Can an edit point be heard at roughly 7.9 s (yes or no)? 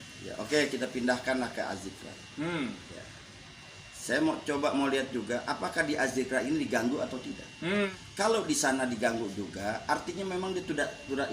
yes